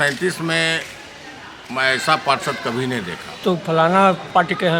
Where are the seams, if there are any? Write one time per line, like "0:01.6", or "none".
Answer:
0:03.4

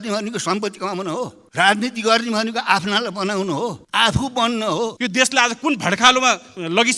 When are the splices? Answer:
0:04.9

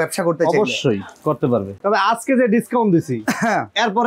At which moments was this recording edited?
0:01.7

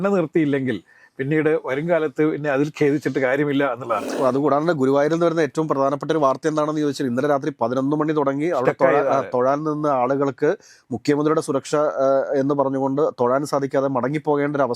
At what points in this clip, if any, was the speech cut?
0:04.1

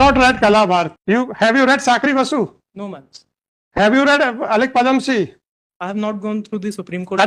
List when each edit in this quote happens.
0:01.0

